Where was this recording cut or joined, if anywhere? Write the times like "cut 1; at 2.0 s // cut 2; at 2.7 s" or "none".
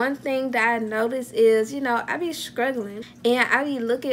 cut 1; at 3.0 s

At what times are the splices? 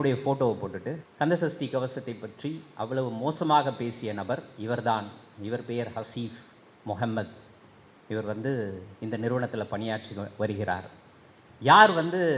cut 1; at 1.1 s

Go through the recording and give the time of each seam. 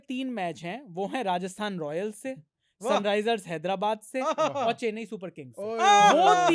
none

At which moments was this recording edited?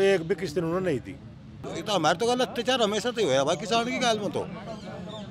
cut 1; at 1.6 s

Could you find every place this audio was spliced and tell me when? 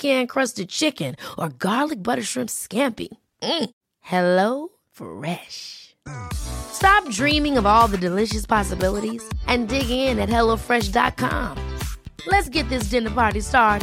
none

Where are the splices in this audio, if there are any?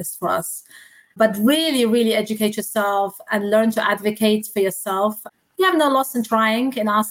none

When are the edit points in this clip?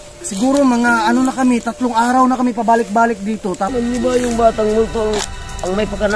cut 1; at 3.7 s

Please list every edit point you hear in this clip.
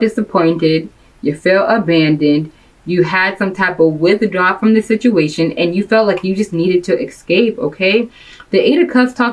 none

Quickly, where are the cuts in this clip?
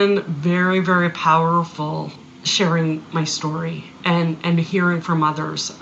cut 1; at 2.2 s

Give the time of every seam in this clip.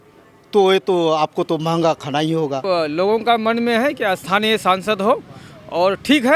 cut 1; at 2.6 s

